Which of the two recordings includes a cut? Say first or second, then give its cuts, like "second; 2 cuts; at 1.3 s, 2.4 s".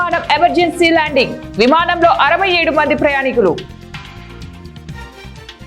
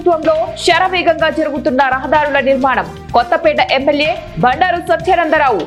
first; 1 cut; at 4.1 s